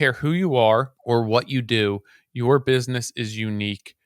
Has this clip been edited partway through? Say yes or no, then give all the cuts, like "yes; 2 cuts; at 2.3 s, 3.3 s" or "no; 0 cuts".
yes; 1 cut; at 0.9 s